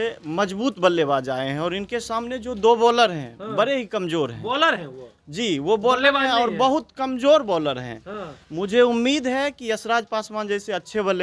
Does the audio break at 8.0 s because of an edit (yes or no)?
no